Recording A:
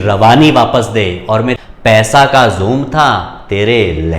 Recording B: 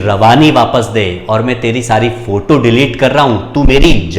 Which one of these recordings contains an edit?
A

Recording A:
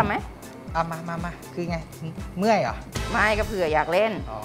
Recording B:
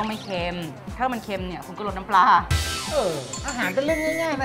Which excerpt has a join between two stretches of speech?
B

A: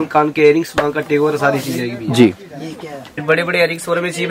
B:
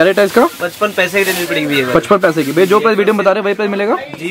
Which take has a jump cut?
A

